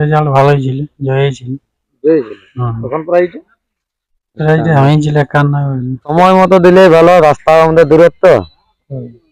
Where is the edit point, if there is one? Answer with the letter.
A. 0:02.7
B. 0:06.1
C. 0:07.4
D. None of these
B